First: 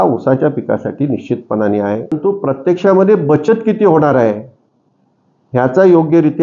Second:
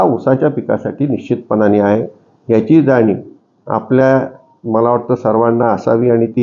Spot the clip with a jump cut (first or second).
first